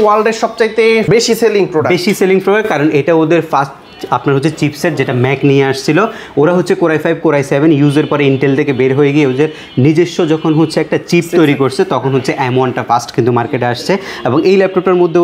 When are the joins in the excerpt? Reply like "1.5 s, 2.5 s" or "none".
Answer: none